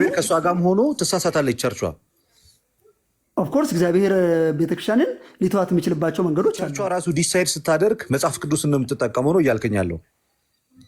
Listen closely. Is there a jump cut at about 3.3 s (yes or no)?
no